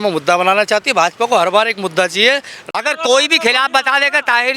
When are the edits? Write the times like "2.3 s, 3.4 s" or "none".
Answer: 2.6 s